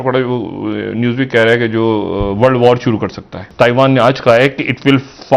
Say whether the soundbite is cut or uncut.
cut